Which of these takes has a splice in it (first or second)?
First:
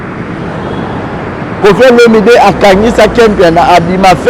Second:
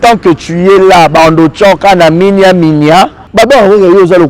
second